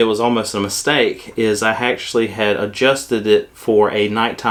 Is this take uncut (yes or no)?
yes